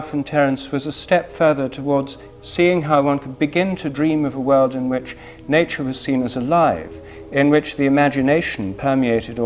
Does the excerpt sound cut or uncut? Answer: uncut